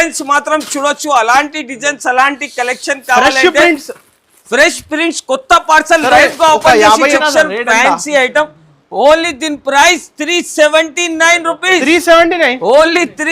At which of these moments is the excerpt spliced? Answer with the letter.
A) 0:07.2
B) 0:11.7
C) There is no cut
A